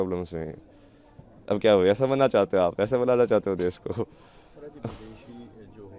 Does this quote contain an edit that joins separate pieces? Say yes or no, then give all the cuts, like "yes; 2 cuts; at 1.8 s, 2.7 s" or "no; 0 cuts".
no; 0 cuts